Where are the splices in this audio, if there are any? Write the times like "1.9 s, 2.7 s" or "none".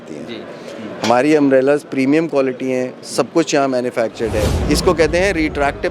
4.6 s

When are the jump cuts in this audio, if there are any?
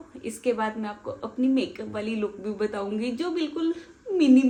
none

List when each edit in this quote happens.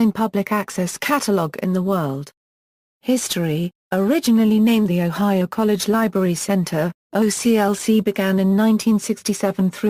8.7 s

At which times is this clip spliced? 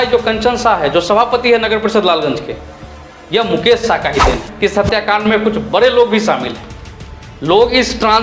4.5 s

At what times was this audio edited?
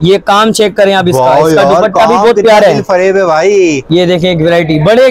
3.8 s

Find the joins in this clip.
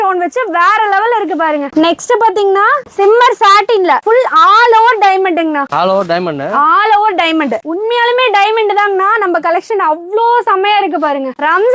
none

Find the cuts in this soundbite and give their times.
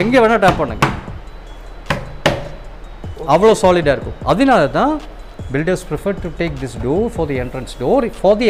none

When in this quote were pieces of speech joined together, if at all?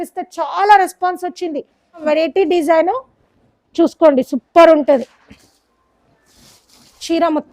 2.0 s

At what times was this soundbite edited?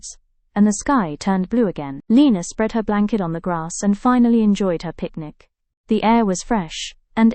none

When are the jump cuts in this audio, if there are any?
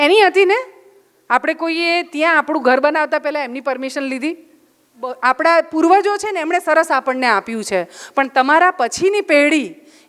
5.1 s

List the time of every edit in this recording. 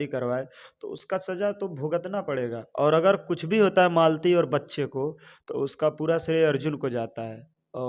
none

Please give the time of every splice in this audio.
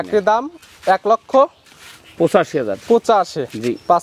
none

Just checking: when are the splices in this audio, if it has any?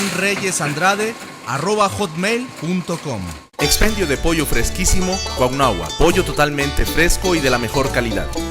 3.4 s

